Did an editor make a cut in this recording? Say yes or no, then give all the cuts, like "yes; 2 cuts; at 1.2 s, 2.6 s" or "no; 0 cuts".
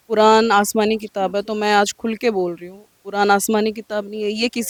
no; 0 cuts